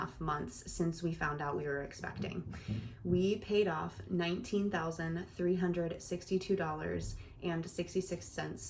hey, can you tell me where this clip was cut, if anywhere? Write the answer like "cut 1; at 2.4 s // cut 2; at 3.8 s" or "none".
none